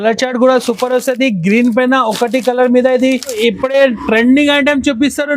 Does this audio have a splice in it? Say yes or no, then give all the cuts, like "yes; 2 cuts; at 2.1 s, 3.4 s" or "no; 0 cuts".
yes; 1 cut; at 3.4 s